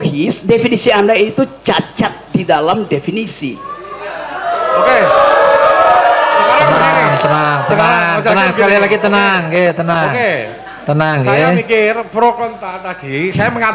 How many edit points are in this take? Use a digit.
0